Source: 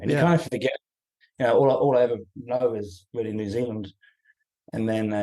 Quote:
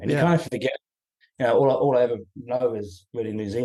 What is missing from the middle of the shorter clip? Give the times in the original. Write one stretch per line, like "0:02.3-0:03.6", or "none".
none